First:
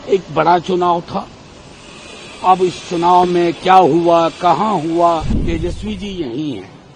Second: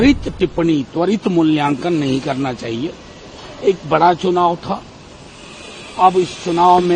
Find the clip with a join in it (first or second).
first